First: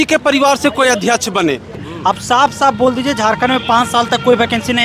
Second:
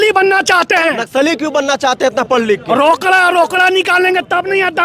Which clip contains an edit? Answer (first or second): first